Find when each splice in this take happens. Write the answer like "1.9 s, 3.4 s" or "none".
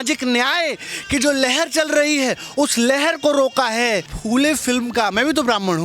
4.1 s